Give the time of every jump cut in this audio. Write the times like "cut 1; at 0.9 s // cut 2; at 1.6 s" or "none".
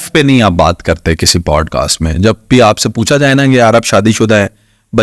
none

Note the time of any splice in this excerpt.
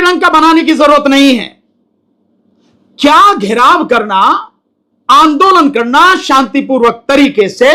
none

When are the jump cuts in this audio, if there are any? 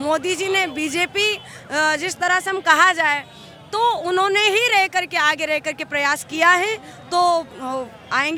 none

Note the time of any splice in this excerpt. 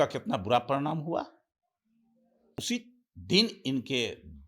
cut 1; at 2.6 s

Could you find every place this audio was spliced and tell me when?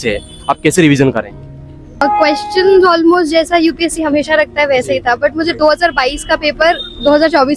cut 1; at 2.0 s

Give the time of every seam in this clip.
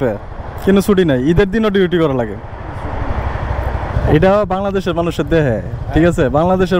none

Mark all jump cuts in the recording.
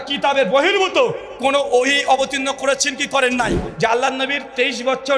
cut 1; at 3.6 s

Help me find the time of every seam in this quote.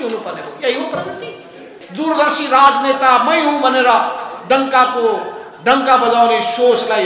cut 1; at 1.8 s

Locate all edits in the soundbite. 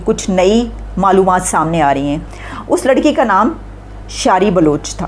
cut 1; at 2.2 s

